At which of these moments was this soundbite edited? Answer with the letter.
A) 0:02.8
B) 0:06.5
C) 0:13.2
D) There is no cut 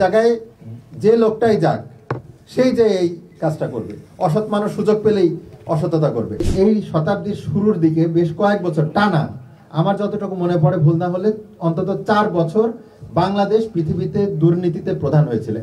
B